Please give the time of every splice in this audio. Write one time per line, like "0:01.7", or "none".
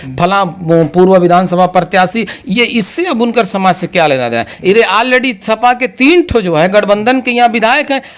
none